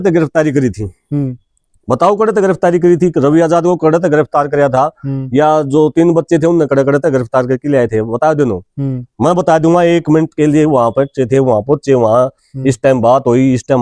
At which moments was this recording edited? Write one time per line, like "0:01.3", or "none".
none